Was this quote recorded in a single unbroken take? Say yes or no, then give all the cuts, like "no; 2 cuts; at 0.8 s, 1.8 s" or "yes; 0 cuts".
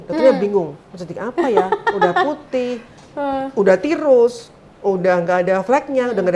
yes; 0 cuts